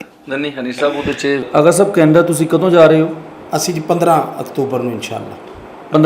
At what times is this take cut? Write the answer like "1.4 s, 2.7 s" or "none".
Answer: 1.4 s